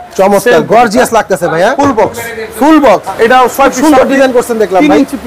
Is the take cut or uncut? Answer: cut